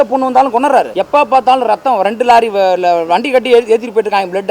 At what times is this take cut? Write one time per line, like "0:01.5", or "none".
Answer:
0:01.0